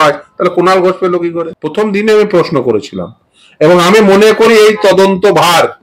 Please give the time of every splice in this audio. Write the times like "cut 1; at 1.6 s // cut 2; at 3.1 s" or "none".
cut 1; at 1.5 s

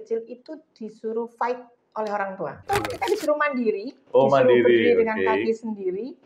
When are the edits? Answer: cut 1; at 2.6 s

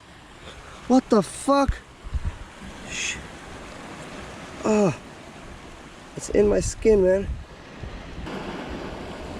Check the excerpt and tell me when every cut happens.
cut 1; at 8.3 s

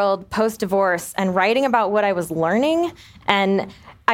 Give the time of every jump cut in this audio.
cut 1; at 3.0 s

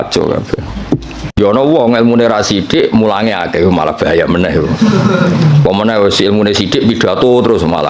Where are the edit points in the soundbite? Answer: cut 1; at 1.3 s

